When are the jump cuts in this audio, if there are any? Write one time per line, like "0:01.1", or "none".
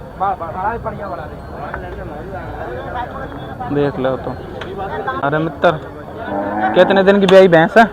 0:05.2